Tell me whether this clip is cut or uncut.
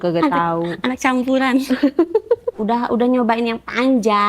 cut